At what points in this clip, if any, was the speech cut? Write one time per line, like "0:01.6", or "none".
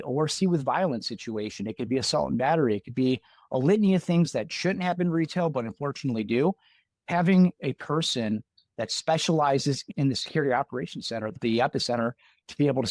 0:09.8
0:11.3